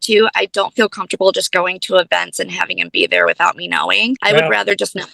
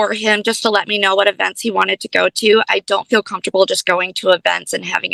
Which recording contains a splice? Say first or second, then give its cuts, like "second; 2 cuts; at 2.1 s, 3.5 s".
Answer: first; 1 cut; at 4.2 s